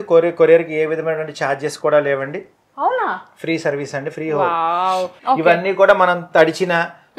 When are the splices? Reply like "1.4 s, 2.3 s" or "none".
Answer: 5.1 s